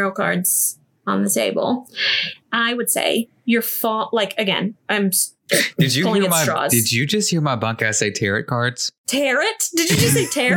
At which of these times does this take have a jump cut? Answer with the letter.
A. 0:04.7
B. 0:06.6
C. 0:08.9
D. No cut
C